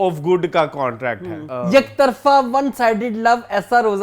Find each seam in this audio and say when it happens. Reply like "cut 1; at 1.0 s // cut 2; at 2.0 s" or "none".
cut 1; at 1.4 s